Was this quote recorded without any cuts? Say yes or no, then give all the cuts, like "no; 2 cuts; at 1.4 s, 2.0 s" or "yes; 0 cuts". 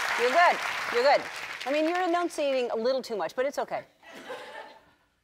no; 1 cut; at 3.5 s